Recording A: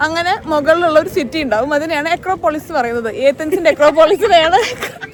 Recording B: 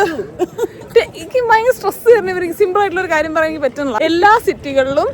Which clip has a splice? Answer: B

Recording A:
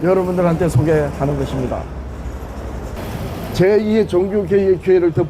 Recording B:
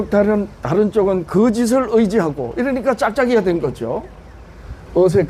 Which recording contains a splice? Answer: A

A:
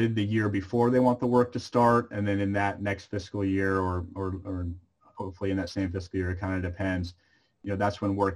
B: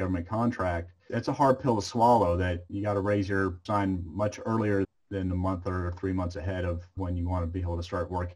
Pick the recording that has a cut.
B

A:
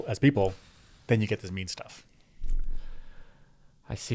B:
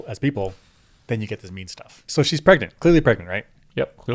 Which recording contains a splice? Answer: B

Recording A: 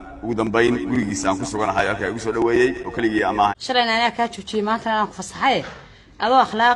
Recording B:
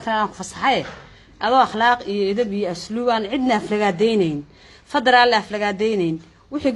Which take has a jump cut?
A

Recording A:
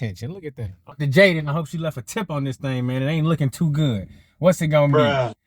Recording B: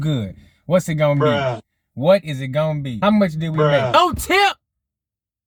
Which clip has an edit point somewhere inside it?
A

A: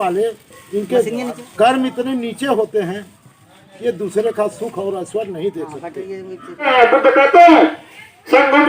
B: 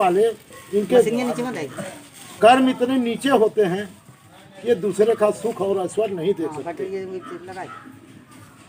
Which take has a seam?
A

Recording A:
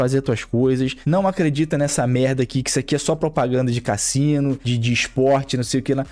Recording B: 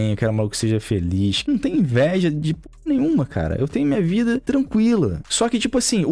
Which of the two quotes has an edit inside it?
B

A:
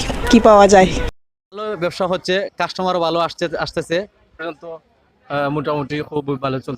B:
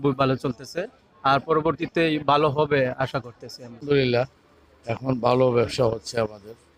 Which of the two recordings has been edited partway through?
A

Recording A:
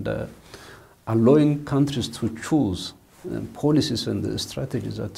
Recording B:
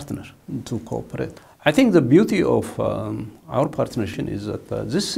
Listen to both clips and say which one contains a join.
B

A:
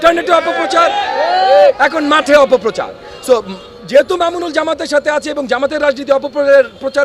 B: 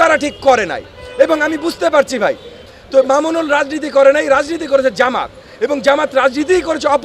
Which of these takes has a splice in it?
B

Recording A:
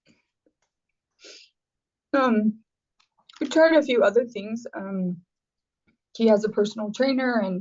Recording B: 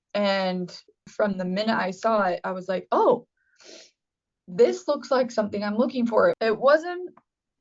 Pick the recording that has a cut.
B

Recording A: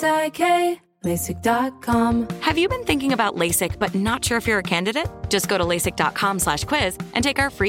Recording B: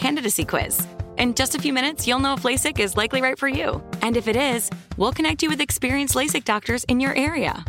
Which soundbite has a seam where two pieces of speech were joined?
A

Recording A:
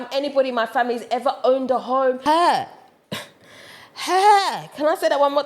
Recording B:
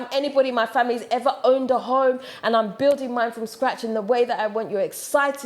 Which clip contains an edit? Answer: A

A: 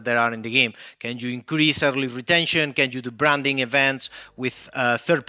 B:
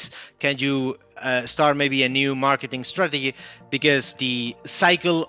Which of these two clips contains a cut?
B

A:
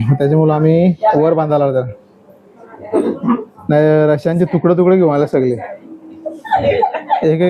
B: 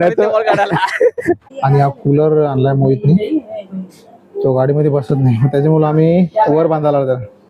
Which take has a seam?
B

